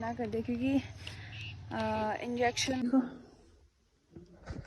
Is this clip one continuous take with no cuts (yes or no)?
no